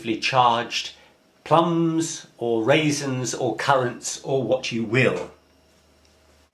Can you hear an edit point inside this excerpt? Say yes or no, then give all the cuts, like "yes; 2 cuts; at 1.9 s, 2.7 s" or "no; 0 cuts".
yes; 1 cut; at 4.8 s